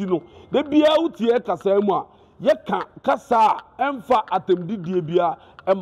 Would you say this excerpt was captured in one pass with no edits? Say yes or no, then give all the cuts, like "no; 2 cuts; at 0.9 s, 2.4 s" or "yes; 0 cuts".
yes; 0 cuts